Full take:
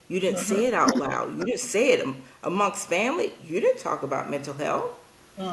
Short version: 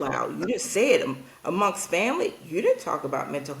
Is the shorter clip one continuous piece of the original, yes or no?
yes